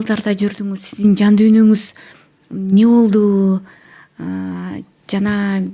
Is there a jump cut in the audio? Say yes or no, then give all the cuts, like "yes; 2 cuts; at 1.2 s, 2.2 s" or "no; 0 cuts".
no; 0 cuts